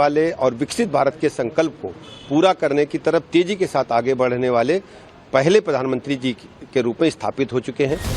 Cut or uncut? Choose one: uncut